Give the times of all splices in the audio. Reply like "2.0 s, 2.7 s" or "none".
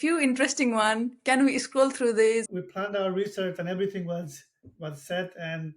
2.5 s